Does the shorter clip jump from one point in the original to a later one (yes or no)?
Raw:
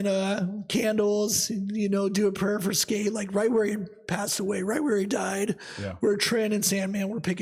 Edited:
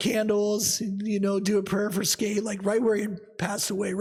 no